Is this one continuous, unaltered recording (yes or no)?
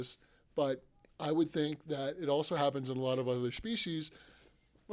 yes